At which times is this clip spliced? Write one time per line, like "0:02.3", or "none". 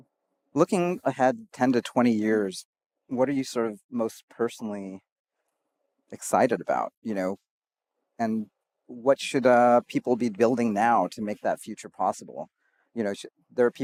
none